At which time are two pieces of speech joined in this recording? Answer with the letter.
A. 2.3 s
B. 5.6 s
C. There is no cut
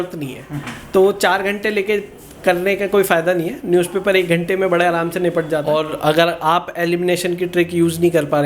B